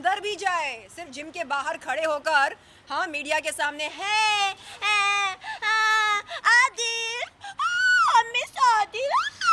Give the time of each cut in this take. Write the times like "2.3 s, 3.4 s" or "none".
none